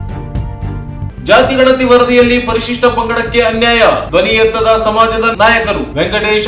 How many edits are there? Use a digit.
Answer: 1